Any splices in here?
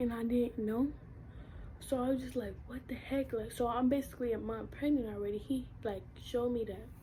no; 0 cuts

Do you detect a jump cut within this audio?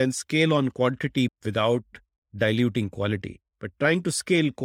yes; 1 cut; at 1.3 s

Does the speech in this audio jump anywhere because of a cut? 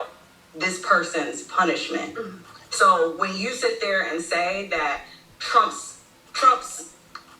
yes; 1 cut; at 2.2 s

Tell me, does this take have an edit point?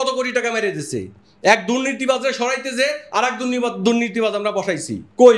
no; 0 cuts

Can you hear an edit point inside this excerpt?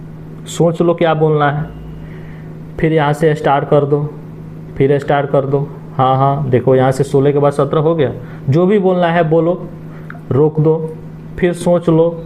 no; 0 cuts

